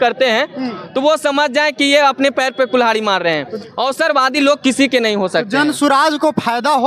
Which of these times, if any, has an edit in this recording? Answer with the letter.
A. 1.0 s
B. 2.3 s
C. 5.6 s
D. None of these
D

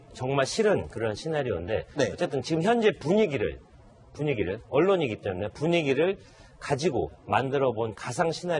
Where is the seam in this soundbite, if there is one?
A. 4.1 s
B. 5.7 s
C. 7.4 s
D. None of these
B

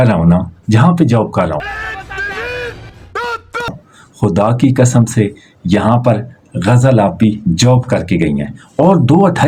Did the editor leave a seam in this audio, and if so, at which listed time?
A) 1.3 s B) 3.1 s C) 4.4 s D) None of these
D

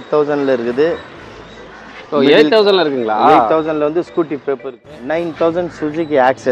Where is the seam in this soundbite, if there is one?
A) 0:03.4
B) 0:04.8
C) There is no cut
B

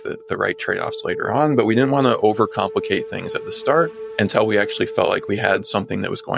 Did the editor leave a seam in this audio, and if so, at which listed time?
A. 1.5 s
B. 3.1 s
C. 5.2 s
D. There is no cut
C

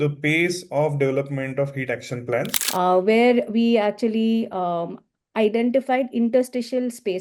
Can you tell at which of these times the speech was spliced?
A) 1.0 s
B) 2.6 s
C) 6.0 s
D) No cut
B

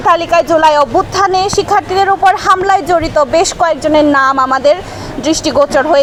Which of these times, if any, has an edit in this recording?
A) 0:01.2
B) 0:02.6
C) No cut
C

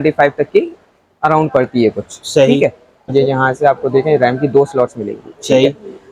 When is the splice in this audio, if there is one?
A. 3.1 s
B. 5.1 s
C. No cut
A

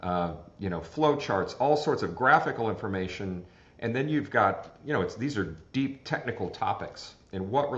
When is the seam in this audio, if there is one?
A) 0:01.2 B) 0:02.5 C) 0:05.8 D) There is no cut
D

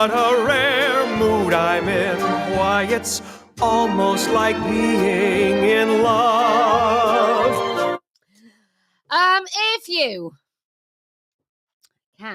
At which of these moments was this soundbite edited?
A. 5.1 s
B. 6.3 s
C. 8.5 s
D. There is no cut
D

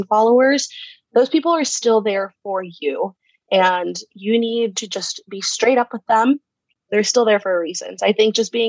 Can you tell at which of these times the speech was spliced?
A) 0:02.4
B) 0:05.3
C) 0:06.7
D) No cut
C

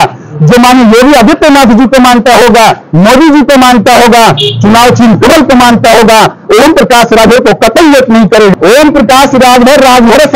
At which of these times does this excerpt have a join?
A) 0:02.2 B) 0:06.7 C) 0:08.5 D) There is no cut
C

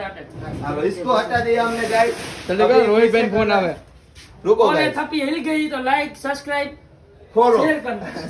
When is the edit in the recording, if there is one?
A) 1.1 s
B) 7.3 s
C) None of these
C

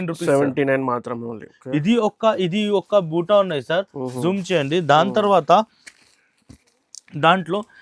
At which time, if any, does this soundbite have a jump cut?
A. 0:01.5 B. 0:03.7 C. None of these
A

